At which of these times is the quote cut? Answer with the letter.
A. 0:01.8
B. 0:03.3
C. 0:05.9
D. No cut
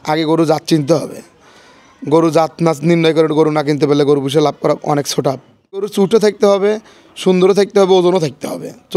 C